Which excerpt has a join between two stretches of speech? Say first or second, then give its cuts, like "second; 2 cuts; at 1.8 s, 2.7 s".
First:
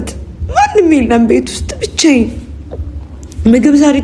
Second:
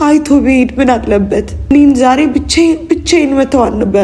second; 1 cut; at 1.7 s